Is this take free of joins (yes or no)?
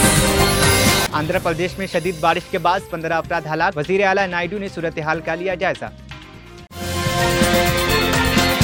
yes